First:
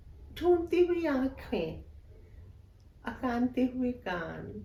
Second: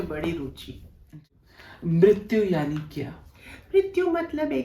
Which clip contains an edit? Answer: second; 1 cut; at 1.1 s

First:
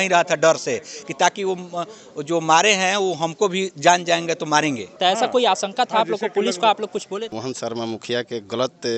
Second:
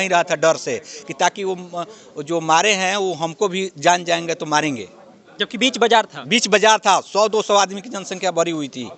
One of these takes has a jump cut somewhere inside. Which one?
first; 2 cuts; at 4.9 s, 7.3 s

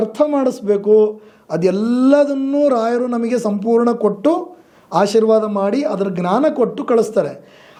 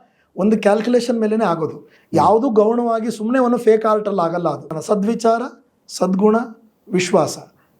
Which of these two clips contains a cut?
second; 1 cut; at 4.8 s

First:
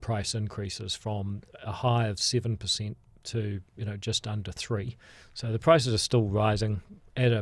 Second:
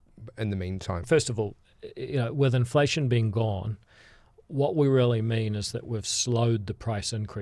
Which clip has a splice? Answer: second; 1 cut; at 1.0 s

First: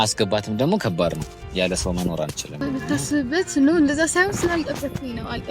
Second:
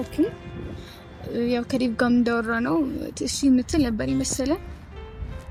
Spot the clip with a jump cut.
first; 1 cut; at 2.6 s

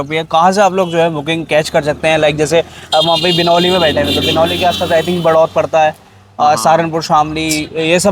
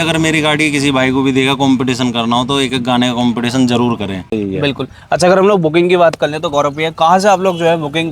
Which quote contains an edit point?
second; 1 cut; at 4.2 s

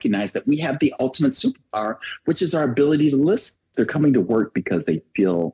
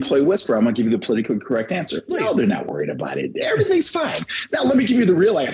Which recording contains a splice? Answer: first; 1 cut; at 3.7 s

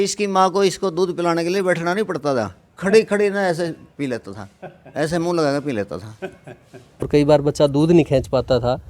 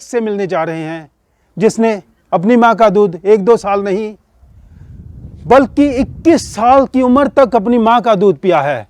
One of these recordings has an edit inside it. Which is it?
first; 1 cut; at 7.1 s

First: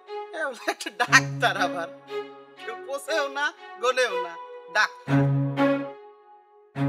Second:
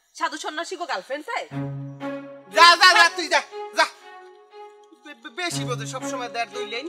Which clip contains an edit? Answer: first; 1 cut; at 6.0 s

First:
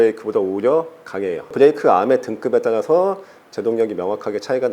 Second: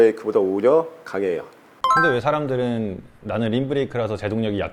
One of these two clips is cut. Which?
first; 1 cut; at 1.5 s

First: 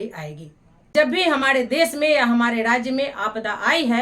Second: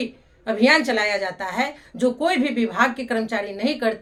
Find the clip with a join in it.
first; 1 cut; at 0.9 s

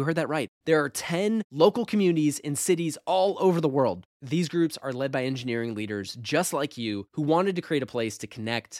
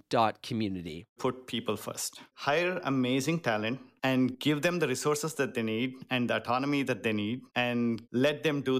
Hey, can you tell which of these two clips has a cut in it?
second; 4 cuts; at 1.1 s, 2.3 s, 4.3 s, 7.7 s

